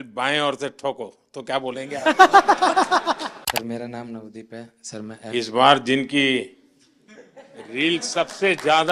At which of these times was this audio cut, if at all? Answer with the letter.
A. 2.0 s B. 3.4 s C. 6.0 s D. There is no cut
B